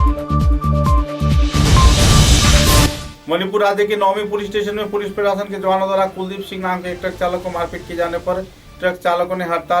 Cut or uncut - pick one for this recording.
cut